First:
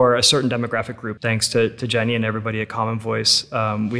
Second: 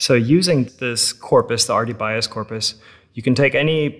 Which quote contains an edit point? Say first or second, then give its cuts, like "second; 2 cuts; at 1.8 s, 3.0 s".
first; 1 cut; at 1.0 s